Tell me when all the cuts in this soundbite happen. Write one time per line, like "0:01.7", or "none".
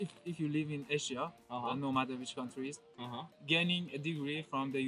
none